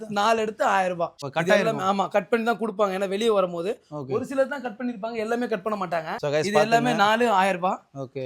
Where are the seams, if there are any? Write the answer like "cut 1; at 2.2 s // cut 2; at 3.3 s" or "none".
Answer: cut 1; at 1.2 s // cut 2; at 6.1 s